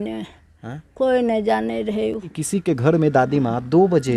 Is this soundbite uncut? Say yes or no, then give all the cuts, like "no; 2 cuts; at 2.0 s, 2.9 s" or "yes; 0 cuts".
no; 1 cut; at 2.3 s